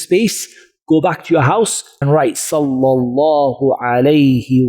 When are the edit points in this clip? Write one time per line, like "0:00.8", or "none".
0:01.9